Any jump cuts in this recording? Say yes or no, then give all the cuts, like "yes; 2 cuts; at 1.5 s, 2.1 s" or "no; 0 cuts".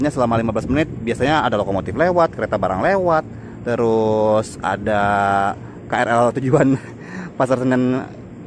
no; 0 cuts